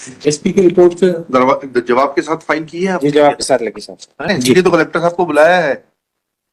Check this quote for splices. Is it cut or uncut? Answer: cut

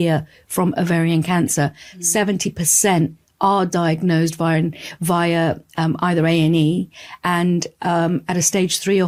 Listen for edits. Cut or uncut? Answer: uncut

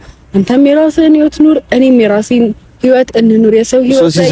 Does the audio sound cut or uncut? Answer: uncut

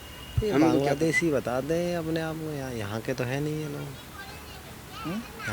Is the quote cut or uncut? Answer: uncut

